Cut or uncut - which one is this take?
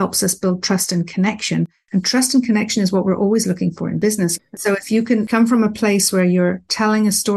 cut